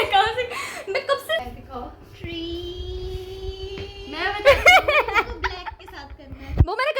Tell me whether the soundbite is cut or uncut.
cut